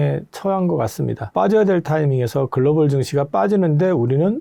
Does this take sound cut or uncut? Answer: uncut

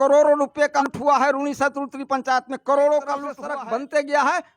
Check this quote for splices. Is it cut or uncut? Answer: cut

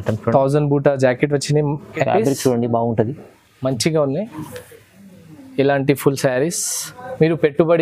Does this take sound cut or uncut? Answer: cut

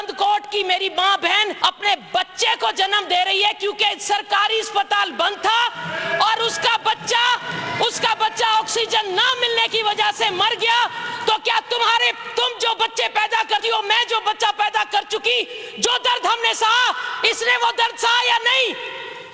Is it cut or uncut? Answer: cut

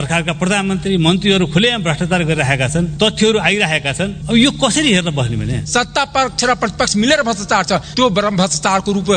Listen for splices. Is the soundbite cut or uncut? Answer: cut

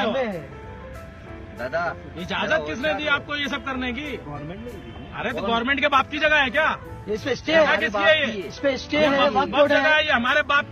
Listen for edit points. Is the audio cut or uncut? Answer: uncut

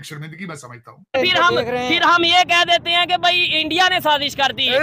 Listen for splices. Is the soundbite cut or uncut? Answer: cut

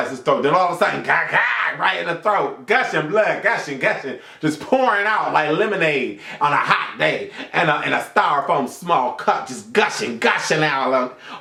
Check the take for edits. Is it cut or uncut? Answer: uncut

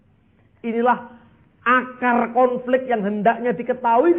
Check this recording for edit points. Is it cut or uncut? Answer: uncut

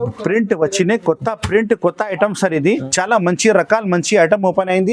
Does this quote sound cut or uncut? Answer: cut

